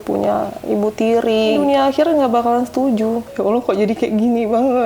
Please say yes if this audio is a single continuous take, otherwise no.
no